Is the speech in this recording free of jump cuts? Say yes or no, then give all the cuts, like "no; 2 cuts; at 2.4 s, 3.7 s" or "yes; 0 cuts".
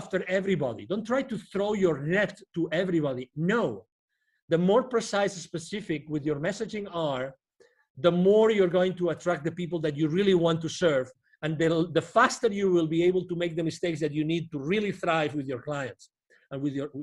yes; 0 cuts